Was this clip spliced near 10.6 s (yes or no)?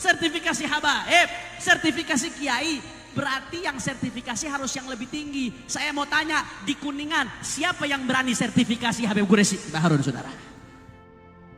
yes